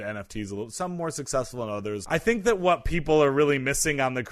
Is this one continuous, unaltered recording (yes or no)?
no